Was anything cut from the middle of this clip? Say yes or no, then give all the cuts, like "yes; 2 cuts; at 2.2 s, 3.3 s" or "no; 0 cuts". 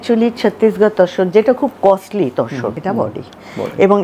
yes; 1 cut; at 2.7 s